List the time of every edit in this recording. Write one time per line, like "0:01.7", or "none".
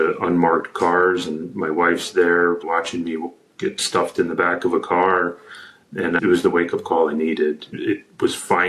0:06.2
0:07.7